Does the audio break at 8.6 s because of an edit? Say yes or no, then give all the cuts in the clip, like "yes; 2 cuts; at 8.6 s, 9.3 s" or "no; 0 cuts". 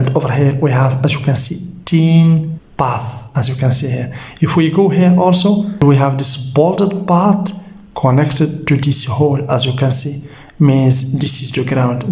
no; 2 cuts; at 2.6 s, 5.8 s